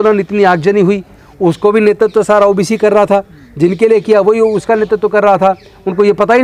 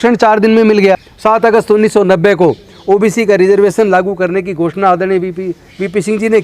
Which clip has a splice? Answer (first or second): second